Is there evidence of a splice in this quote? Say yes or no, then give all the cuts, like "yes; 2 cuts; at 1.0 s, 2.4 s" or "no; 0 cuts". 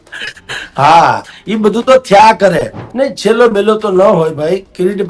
yes; 1 cut; at 2.8 s